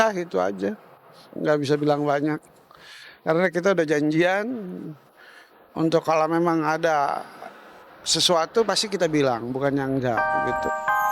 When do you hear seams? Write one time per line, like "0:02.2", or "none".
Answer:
0:10.2